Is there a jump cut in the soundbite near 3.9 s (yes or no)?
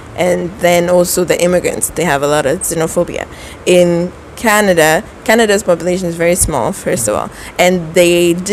no